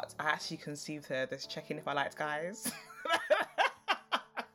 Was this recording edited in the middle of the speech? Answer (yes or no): no